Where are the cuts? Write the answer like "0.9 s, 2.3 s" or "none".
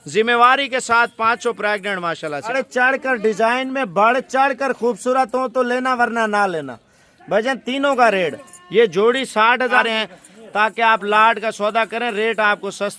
2.5 s, 9.8 s